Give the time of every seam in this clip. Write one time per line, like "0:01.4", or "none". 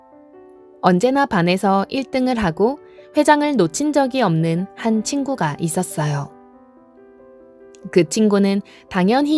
0:06.5
0:07.8

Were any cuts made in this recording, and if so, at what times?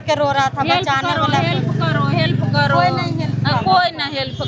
none

